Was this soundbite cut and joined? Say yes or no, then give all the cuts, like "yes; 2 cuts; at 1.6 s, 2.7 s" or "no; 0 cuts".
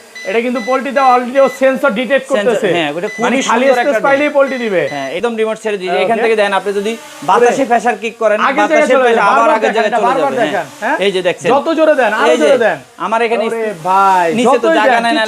yes; 1 cut; at 5.2 s